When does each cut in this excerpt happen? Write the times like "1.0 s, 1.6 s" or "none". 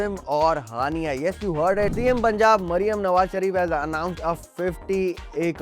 1.9 s